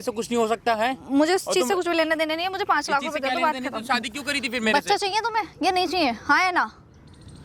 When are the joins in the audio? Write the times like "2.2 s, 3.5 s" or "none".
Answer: none